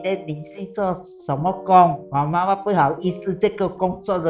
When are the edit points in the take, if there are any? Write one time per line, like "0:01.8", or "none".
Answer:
0:02.0